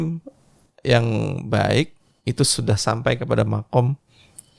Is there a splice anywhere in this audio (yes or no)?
no